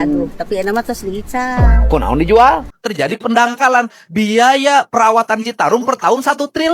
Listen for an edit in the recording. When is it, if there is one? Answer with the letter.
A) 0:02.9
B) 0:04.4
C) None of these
A